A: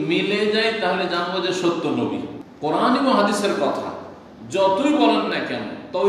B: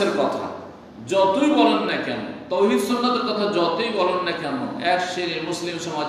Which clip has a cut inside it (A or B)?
A